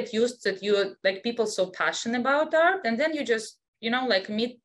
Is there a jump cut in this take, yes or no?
no